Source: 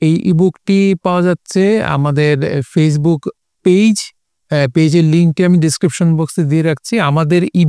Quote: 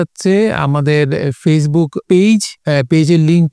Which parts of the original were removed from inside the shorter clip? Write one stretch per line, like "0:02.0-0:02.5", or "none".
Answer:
0:03.3-0:03.5
0:04.1-0:04.4